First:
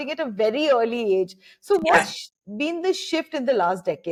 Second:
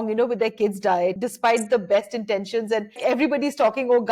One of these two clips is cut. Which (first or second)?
second